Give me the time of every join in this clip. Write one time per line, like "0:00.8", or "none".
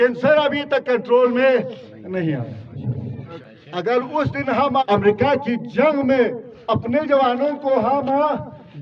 0:03.3
0:04.8